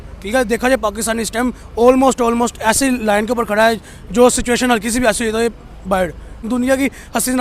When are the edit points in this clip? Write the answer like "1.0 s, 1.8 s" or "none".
6.5 s